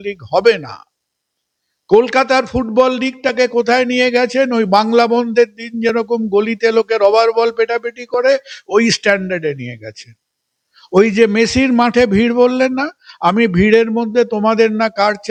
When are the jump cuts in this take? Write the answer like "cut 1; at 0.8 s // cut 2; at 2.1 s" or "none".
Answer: none

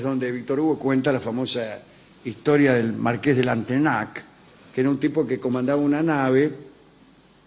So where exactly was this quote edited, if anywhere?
none

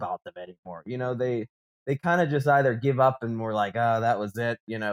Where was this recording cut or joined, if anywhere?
none

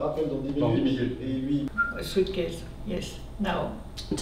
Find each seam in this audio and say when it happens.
cut 1; at 1.7 s

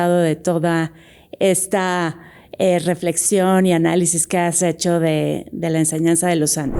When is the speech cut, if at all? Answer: none

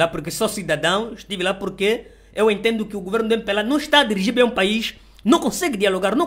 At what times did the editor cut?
none

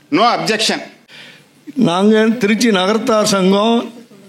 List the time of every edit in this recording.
cut 1; at 1.0 s

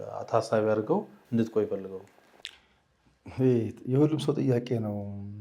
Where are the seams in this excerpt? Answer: none

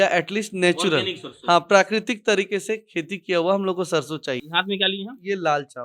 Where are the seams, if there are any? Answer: cut 1; at 4.5 s

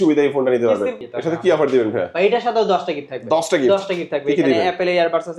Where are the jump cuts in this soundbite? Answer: cut 1; at 1.0 s

